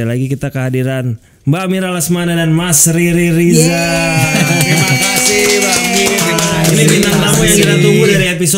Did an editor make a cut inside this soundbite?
no; 0 cuts

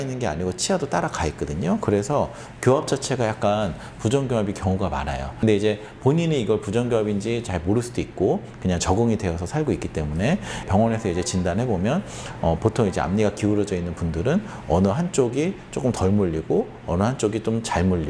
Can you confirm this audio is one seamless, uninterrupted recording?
yes; 0 cuts

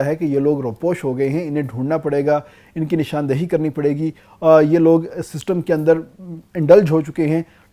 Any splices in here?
no; 0 cuts

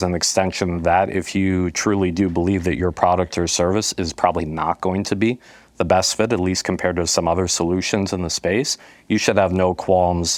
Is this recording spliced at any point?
no; 0 cuts

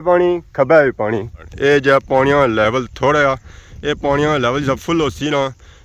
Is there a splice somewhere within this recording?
yes; 1 cut; at 1.5 s

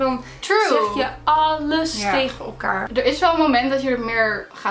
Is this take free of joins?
no; 1 cut; at 2.9 s

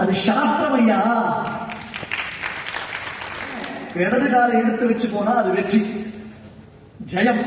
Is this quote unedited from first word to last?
no; 1 cut; at 3.8 s

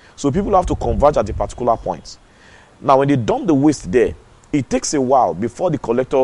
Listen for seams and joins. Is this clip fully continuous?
yes; 0 cuts

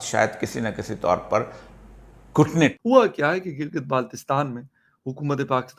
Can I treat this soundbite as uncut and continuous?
no; 1 cut; at 2.8 s

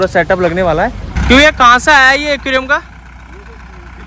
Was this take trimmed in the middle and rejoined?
yes; 1 cut; at 1.0 s

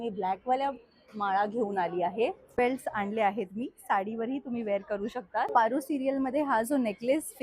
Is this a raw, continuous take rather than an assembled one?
no; 2 cuts; at 2.5 s, 5.5 s

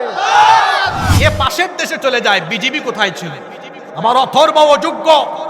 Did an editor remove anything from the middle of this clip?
yes; 1 cut; at 1.1 s

